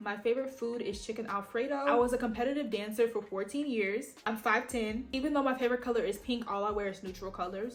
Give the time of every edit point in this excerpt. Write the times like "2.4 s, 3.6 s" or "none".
none

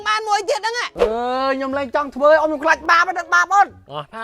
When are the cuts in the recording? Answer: 1.0 s

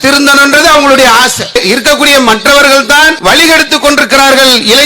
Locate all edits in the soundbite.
1.6 s, 3.1 s

